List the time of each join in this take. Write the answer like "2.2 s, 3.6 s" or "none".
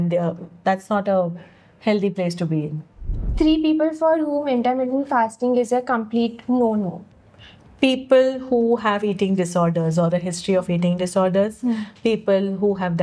3.3 s